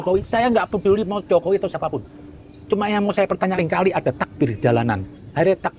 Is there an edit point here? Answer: yes; 1 cut; at 3.6 s

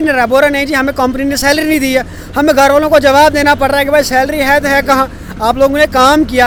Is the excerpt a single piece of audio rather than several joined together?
yes; 0 cuts

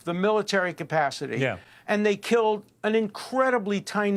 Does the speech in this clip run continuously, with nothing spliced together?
yes; 0 cuts

